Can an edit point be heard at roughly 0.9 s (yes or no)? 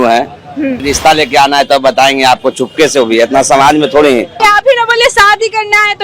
yes